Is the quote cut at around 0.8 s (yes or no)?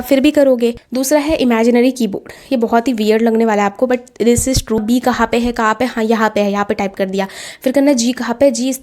yes